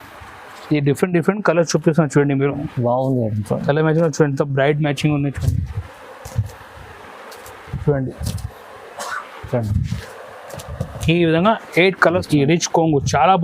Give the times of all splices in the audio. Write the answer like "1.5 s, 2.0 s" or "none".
12.2 s